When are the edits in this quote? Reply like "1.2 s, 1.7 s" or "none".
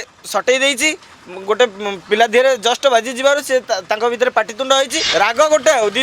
5.0 s